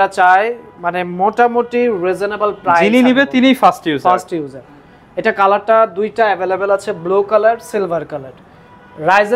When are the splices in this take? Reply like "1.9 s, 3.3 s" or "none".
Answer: none